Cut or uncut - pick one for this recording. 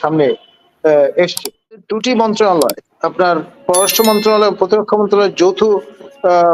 cut